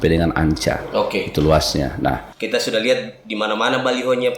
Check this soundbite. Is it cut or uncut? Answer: cut